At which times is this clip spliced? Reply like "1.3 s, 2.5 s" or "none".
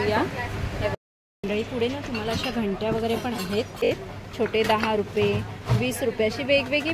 0.9 s, 3.9 s